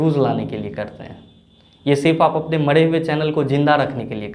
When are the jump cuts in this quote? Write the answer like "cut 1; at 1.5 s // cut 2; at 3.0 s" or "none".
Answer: none